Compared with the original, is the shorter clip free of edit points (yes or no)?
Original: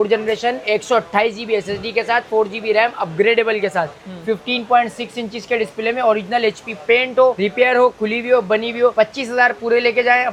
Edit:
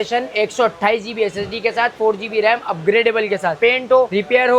no